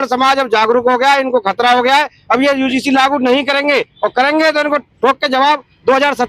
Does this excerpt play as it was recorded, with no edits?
yes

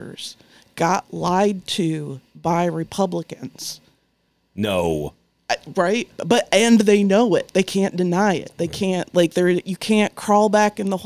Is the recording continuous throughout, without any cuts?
yes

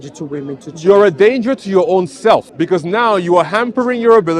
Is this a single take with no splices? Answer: no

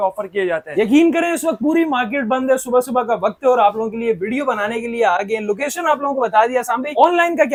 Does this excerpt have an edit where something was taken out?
no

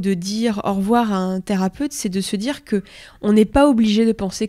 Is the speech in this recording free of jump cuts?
yes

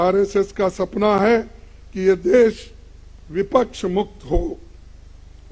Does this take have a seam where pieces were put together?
no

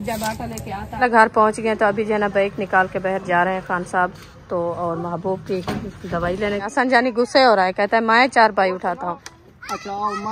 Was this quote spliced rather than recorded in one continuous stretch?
yes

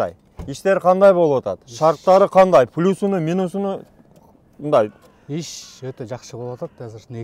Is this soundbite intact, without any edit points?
yes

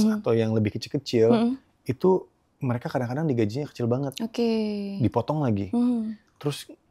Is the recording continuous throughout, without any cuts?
yes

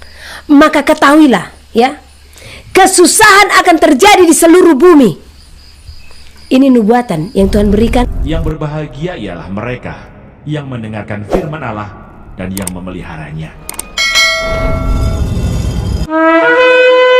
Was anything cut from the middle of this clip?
yes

